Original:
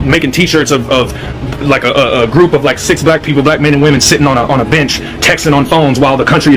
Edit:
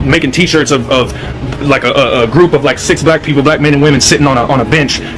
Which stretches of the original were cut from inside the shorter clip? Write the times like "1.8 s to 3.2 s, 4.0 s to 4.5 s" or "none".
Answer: none